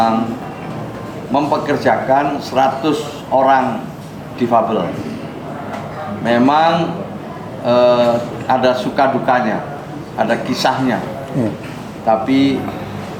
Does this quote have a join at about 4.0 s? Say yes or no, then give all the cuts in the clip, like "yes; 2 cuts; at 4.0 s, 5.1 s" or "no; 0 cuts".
no; 0 cuts